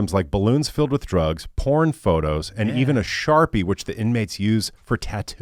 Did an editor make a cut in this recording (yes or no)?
no